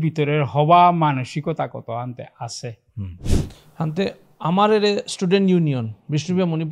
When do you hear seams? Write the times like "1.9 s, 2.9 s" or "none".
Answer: 3.3 s